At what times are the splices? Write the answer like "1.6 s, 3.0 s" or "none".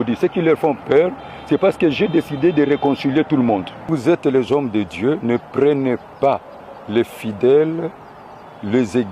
3.9 s